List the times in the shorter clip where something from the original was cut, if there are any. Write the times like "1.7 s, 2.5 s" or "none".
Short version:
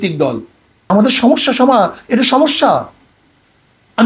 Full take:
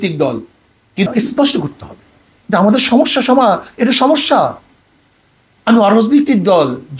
0.9 s